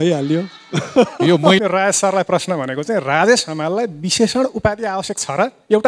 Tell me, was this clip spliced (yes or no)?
yes